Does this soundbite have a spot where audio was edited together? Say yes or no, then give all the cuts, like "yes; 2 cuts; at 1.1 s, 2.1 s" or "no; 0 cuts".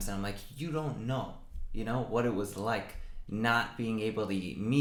no; 0 cuts